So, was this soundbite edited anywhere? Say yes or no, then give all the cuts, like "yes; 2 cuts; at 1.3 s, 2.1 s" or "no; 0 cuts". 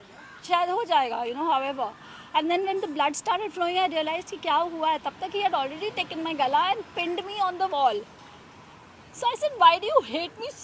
no; 0 cuts